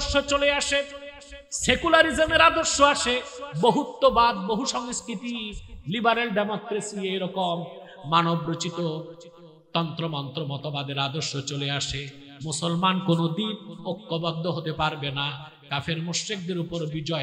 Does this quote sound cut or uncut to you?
uncut